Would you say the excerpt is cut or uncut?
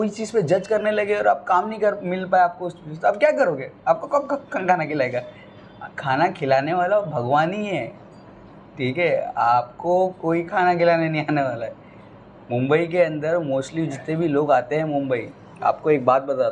uncut